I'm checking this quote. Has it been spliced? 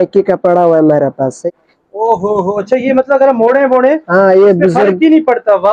yes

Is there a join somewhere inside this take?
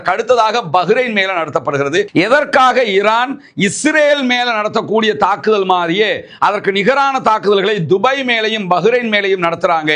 yes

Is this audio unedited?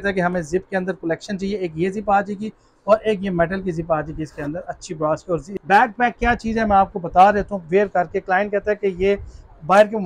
no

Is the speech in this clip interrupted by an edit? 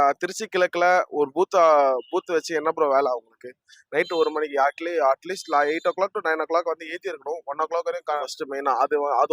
yes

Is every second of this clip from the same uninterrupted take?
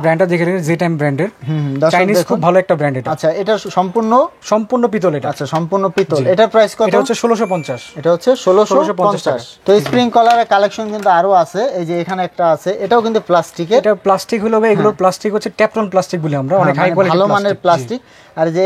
yes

